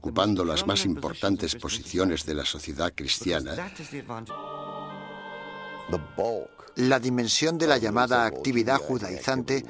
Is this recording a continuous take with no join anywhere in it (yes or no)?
yes